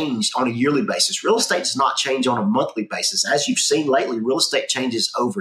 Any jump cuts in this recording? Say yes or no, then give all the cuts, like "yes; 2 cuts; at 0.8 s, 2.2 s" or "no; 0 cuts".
no; 0 cuts